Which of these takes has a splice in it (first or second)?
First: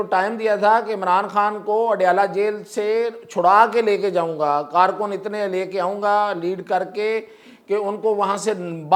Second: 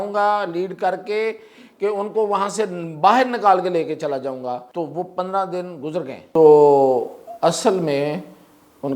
second